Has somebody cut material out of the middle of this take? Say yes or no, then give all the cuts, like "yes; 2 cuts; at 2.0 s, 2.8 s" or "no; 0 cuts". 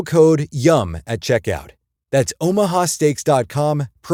no; 0 cuts